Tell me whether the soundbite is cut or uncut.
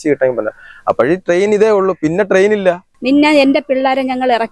cut